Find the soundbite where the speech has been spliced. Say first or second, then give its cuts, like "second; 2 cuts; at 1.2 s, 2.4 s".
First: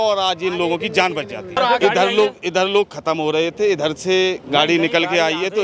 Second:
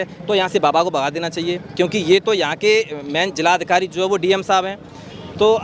first; 1 cut; at 1.6 s